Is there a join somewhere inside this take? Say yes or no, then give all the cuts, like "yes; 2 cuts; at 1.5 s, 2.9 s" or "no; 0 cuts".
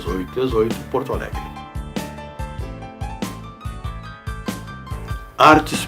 no; 0 cuts